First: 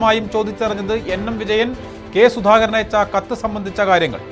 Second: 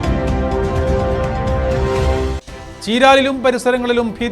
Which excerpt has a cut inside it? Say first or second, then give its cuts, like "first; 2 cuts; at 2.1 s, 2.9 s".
second; 1 cut; at 2.7 s